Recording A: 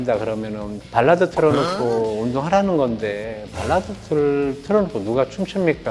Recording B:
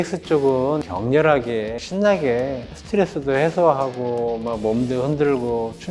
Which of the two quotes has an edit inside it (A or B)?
B